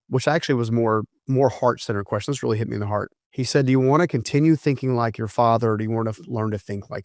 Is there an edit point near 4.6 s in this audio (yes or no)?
no